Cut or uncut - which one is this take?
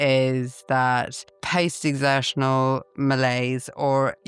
uncut